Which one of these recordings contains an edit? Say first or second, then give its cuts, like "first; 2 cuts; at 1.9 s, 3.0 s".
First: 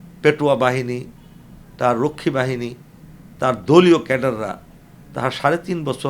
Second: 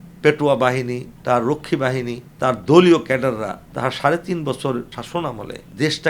second; 4 cuts; at 1.1 s, 2.2 s, 3.6 s, 5.2 s